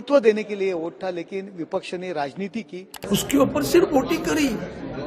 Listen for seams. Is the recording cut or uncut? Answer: cut